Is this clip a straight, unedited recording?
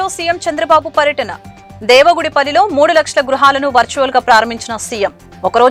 yes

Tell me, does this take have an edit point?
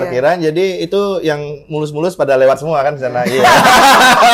no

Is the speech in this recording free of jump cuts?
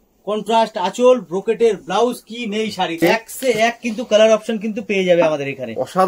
no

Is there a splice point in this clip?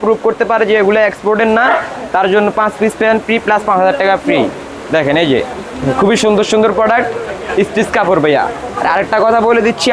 no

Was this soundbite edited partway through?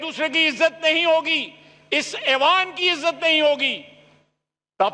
no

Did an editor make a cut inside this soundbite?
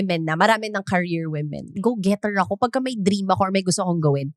yes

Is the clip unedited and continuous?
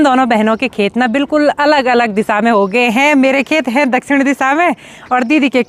yes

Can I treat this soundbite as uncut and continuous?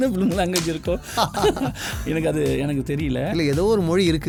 yes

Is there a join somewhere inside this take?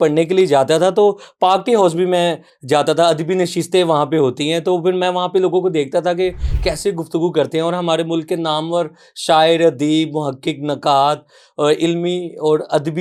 no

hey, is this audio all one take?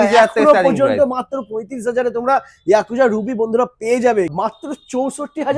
no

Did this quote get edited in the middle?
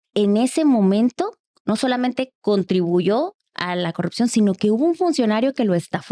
no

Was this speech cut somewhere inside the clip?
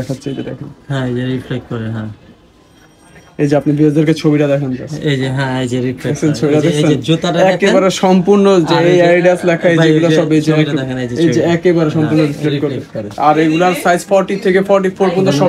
no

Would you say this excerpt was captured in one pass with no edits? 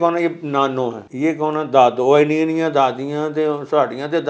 no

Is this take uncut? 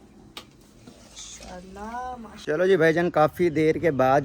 no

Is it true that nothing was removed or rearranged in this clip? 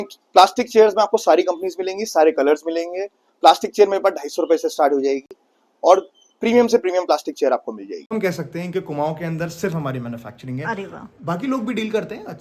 no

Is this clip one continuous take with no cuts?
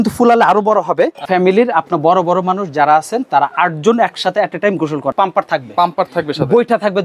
no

